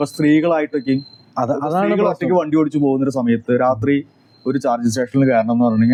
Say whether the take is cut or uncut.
uncut